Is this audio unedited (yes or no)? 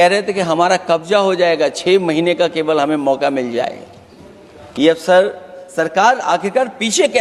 yes